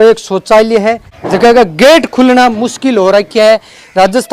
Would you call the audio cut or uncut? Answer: cut